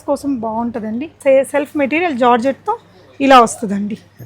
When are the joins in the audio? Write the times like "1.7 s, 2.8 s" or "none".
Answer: 1.2 s